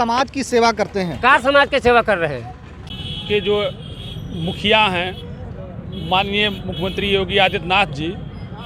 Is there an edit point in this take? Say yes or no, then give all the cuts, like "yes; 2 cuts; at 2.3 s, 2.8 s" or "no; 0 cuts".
yes; 1 cut; at 2.9 s